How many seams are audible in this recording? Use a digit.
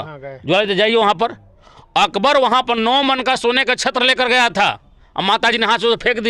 0